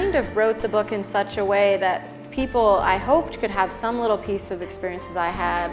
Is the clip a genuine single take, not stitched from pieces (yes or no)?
yes